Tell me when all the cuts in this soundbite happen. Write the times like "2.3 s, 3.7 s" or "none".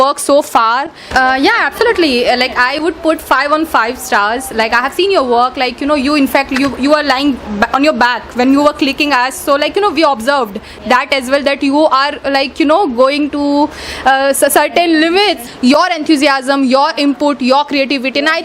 none